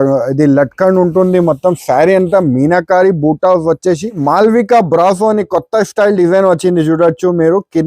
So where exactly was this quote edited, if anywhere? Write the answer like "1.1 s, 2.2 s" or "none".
4.1 s